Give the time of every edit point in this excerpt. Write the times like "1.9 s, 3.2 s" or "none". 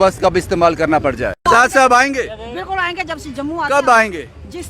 1.4 s

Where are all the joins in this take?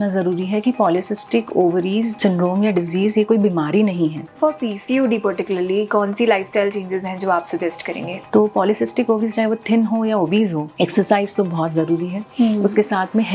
2.2 s, 4.3 s, 8.2 s, 10.7 s

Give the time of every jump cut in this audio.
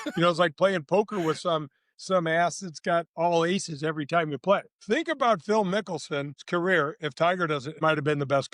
4.7 s, 6.4 s, 7.8 s

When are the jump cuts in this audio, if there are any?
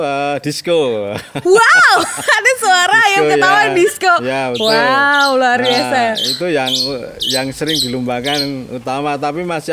none

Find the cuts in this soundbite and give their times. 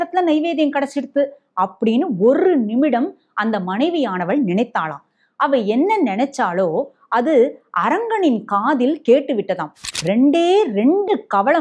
9.9 s

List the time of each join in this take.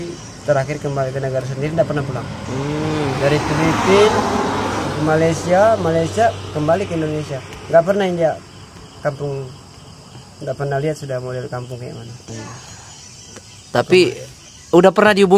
12.3 s

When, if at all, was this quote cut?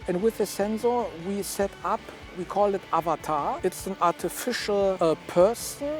2.4 s, 3.6 s, 5.0 s

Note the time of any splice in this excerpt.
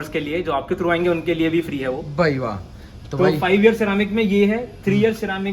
none

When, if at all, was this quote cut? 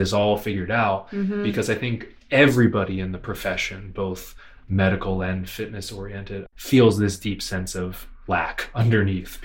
6.5 s

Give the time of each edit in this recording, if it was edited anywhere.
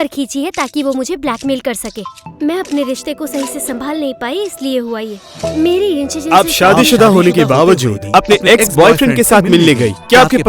2.2 s

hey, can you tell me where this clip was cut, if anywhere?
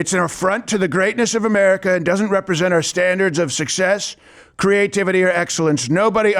none

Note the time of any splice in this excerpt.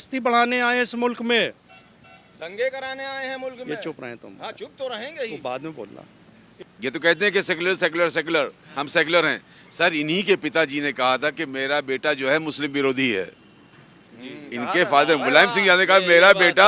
6.4 s

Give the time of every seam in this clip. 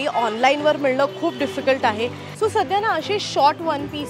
2.2 s

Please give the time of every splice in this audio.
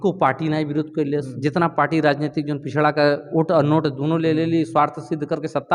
none

